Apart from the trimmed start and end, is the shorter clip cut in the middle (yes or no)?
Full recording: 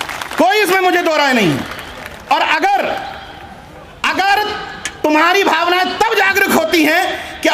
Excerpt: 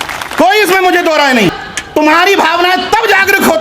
yes